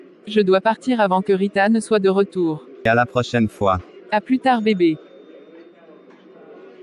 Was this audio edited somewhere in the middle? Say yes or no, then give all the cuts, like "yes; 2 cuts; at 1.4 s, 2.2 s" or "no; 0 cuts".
yes; 1 cut; at 2.9 s